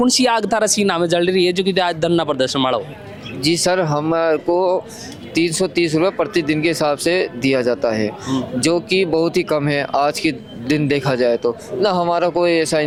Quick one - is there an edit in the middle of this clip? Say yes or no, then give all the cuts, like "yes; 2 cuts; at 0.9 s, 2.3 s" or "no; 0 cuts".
no; 0 cuts